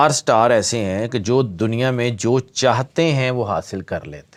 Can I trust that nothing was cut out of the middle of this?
yes; 0 cuts

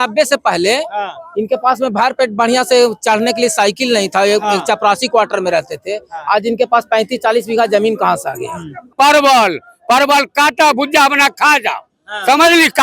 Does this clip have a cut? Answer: yes; 1 cut; at 8.9 s

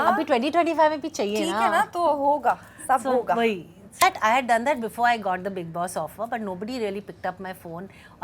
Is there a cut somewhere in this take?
yes; 1 cut; at 4.0 s

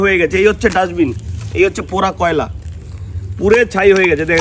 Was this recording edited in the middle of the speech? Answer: no; 0 cuts

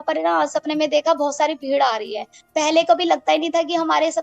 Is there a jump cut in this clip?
no; 0 cuts

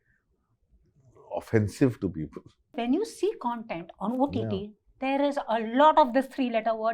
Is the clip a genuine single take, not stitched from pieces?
no; 1 cut; at 2.8 s

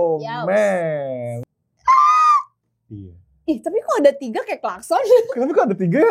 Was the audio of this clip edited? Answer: yes; 1 cut; at 1.3 s

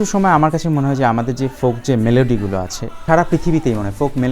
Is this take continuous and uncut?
no; 1 cut; at 3.0 s

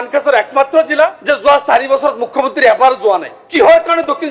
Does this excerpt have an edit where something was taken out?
yes; 2 cuts; at 1.2 s, 3.4 s

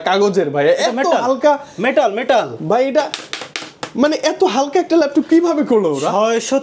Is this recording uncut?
yes; 0 cuts

